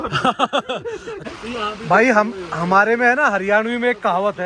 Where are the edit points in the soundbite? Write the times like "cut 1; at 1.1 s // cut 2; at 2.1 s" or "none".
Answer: cut 1; at 1.1 s